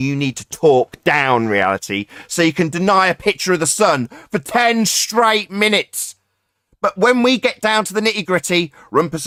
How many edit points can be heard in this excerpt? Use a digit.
0